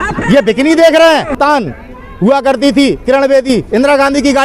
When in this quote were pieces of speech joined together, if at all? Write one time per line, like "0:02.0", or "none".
0:01.3